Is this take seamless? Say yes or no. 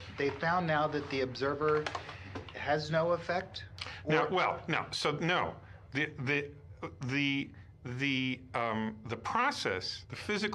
yes